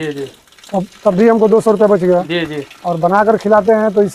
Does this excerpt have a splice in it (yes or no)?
no